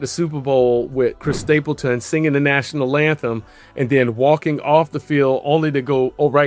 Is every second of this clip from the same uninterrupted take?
no; 1 cut; at 1.3 s

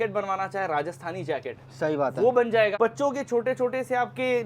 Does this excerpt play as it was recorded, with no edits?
no; 1 cut; at 2.7 s

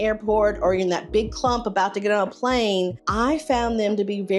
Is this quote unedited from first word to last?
no; 1 cut; at 3.0 s

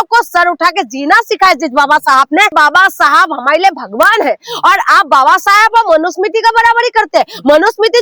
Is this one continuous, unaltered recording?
no; 1 cut; at 2.5 s

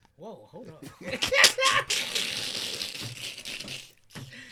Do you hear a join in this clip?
no; 0 cuts

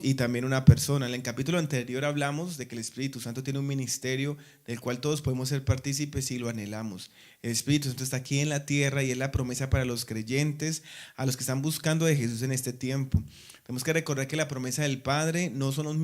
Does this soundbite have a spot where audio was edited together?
yes; 1 cut; at 4.8 s

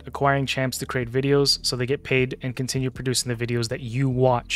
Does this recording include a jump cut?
no; 0 cuts

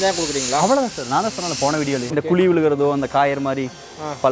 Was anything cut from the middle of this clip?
yes; 1 cut; at 2.1 s

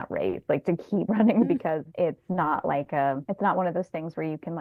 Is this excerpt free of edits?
yes; 0 cuts

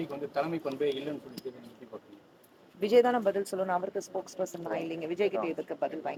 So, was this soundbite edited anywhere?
no; 0 cuts

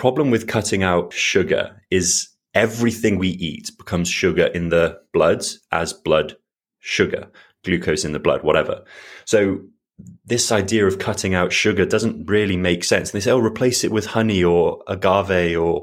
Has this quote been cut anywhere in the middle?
yes; 1 cut; at 1.2 s

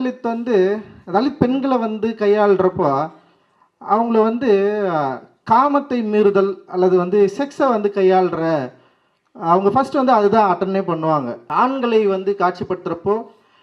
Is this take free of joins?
no; 1 cut; at 11.4 s

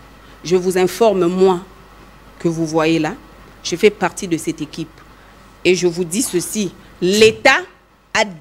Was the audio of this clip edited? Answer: no; 0 cuts

